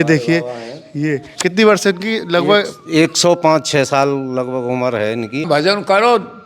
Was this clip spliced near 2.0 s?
no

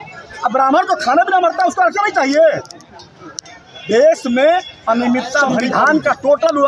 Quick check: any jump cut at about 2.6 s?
no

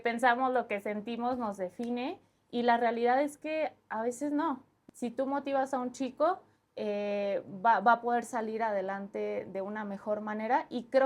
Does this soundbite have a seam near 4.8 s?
yes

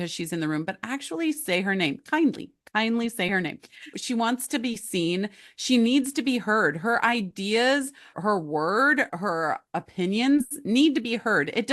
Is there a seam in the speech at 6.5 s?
no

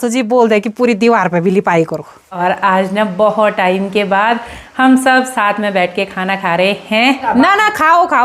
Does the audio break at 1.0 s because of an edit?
no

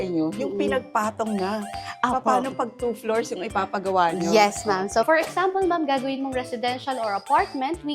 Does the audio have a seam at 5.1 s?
yes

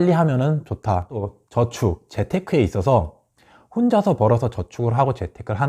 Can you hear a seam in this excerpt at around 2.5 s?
no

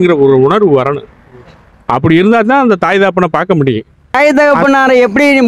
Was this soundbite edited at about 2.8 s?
no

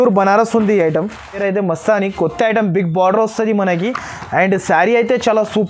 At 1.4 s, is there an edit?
yes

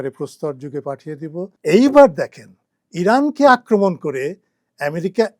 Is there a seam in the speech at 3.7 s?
no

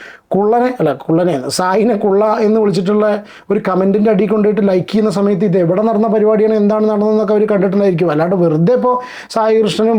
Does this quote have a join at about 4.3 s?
no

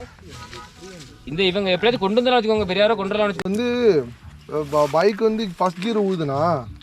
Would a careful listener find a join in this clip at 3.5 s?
yes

